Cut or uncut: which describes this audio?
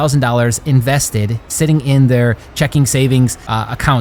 uncut